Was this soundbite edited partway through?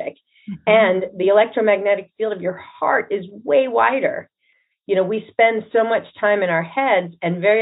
yes; 1 cut; at 4.6 s

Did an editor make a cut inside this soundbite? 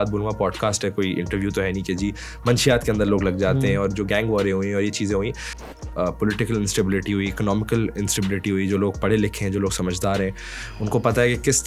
yes; 1 cut; at 5.6 s

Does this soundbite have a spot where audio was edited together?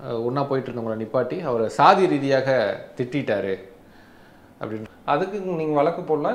yes; 1 cut; at 4.8 s

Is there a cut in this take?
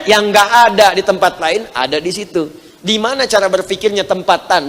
no; 0 cuts

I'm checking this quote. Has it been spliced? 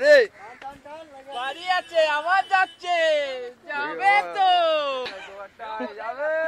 yes; 1 cut; at 5.2 s

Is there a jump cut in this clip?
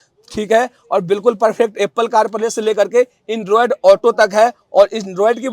no; 0 cuts

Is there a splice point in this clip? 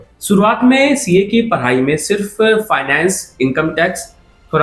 no; 0 cuts

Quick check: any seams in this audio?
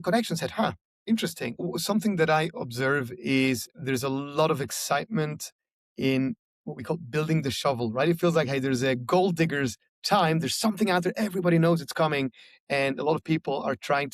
yes; 1 cut; at 1.6 s

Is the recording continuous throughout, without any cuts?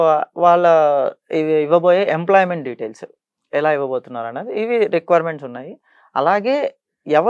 yes; 0 cuts

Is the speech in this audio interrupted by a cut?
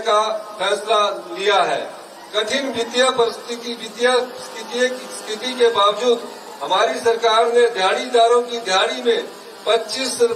no; 0 cuts

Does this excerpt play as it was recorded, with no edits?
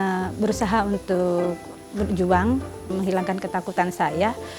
no; 1 cut; at 2.9 s

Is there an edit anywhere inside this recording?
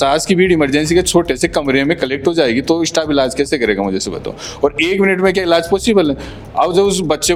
no; 0 cuts

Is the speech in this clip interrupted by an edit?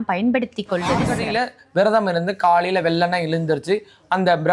yes; 1 cut; at 1.2 s

